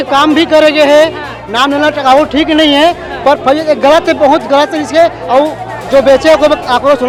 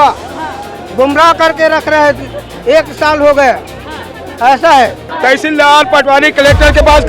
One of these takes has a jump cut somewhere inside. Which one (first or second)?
second